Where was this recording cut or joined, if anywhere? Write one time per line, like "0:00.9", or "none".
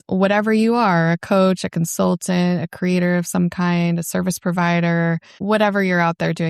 0:05.4